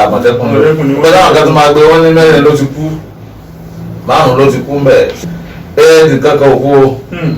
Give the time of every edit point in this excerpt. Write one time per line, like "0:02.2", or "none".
0:05.2